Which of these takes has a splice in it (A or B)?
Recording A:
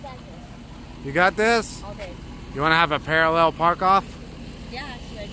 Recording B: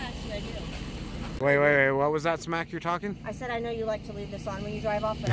B